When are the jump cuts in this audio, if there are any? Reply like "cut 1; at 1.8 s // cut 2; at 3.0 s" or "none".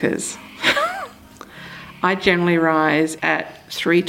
cut 1; at 3.2 s